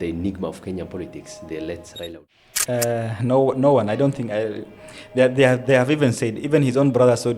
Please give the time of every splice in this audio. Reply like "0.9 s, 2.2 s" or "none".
2.2 s